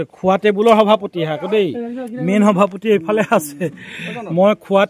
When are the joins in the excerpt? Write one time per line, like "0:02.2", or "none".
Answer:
none